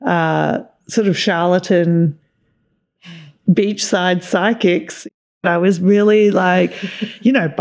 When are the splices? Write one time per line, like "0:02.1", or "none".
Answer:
0:05.2